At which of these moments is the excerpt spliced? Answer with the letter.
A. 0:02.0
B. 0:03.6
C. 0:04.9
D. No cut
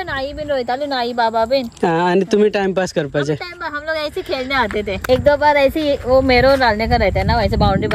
C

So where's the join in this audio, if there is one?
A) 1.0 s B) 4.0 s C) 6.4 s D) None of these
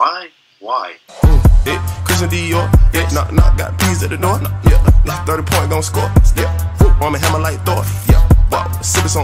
A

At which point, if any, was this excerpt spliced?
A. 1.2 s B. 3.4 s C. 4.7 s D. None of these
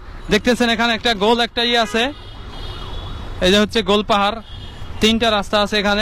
D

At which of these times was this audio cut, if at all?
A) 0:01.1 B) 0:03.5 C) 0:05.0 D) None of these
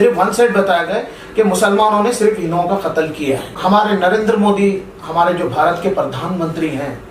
B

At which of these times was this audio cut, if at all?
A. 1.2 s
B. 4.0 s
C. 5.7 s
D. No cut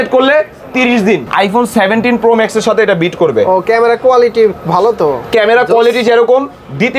A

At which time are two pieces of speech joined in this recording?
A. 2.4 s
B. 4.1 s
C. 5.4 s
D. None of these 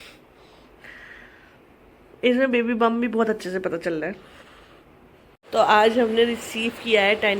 C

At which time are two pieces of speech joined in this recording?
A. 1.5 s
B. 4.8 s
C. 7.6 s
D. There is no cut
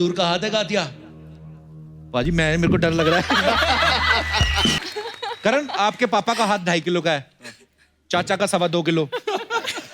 B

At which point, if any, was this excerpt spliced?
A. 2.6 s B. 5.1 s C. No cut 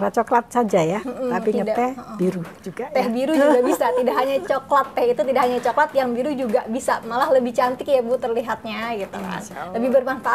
C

